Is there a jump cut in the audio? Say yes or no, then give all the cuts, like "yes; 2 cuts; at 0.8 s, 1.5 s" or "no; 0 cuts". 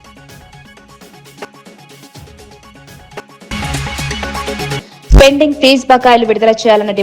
yes; 2 cuts; at 1.4 s, 2.9 s